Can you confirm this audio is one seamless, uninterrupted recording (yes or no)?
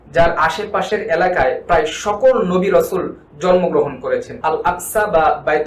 no